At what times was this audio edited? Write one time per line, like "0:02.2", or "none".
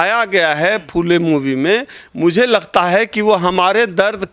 none